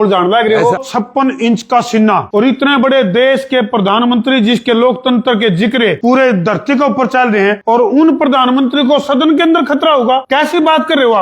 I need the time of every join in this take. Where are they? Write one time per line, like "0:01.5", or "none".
0:00.8
0:02.3
0:06.0
0:07.6
0:10.2